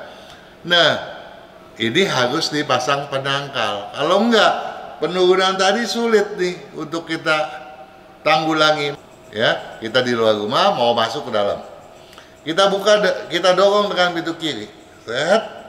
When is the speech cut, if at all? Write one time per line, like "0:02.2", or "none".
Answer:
0:08.9